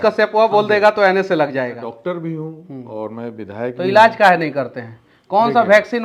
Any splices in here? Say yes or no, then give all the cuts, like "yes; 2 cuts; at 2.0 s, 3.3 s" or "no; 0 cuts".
yes; 1 cut; at 1.8 s